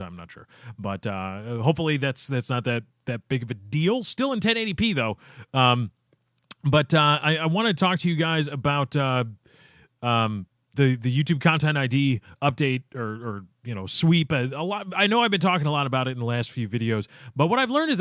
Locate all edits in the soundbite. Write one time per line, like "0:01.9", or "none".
0:08.5